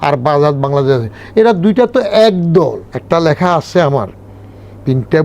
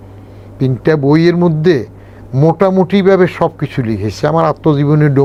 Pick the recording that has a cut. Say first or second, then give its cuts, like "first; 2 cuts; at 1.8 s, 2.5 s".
first; 1 cut; at 2.9 s